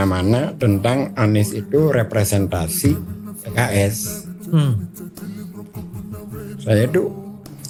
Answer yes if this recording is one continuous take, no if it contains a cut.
yes